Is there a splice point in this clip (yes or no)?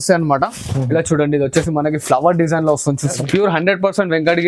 yes